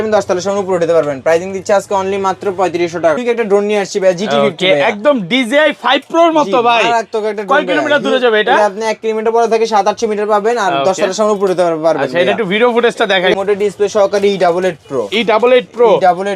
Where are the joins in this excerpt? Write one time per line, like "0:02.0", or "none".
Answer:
0:03.2
0:13.4